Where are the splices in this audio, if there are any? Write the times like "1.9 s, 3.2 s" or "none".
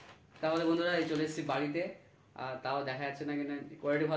none

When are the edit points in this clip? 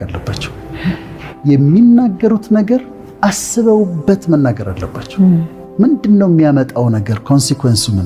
none

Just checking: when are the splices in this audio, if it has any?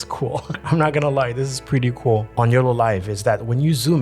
2.3 s

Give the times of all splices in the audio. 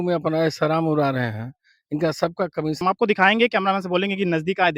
2.8 s

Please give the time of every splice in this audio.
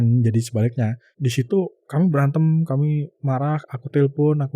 1.1 s

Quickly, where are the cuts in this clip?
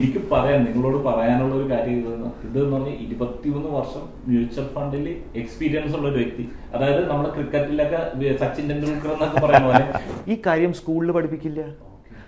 10.0 s

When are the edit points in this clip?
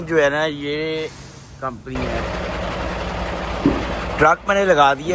2.1 s

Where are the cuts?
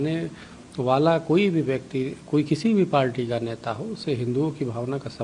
none

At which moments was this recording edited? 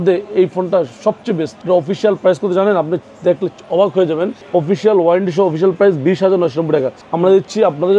1.5 s, 4.4 s, 7.0 s

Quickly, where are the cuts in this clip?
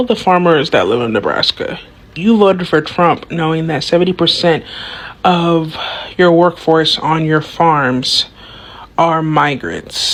none

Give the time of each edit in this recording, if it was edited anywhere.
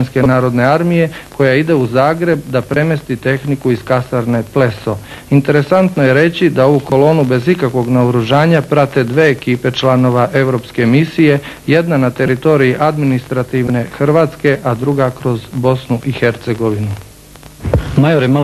none

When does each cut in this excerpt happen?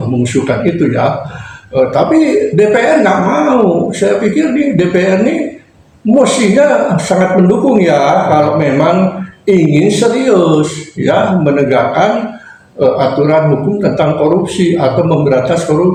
none

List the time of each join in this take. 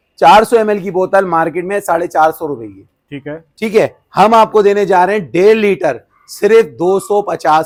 none

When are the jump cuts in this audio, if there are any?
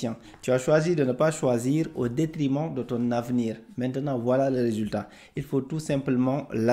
none

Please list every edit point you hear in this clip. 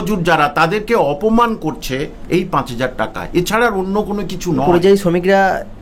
4.6 s

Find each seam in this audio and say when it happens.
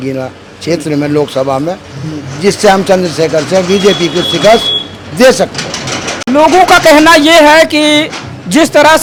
none

